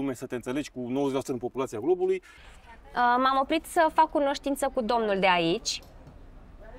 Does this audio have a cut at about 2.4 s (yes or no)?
yes